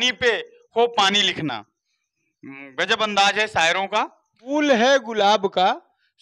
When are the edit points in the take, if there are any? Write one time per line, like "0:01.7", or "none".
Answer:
0:04.3